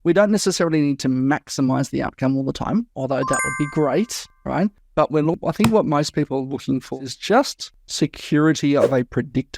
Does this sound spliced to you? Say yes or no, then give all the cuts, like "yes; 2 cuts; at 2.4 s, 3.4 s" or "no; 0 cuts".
yes; 1 cut; at 7.0 s